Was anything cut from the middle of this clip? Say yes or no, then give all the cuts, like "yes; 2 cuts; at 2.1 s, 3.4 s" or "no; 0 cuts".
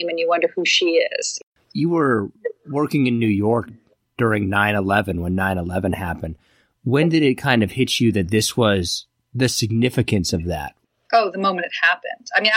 yes; 1 cut; at 1.3 s